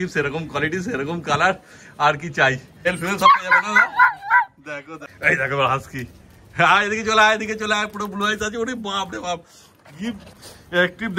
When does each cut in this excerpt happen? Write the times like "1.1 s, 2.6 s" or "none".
2.9 s, 5.0 s